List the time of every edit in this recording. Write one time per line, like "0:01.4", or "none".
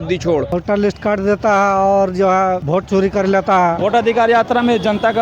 0:00.9
0:02.6
0:03.8